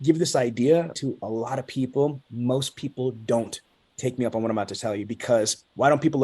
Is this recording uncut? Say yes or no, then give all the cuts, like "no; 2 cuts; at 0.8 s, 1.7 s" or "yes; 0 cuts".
no; 1 cut; at 1.0 s